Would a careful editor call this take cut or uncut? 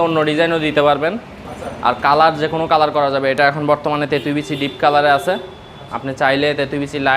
uncut